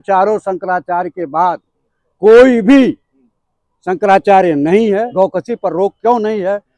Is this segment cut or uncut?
cut